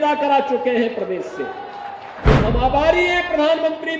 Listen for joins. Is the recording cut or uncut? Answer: cut